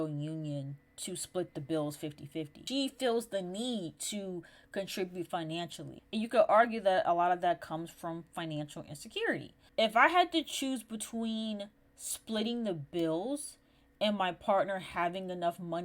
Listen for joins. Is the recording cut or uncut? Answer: cut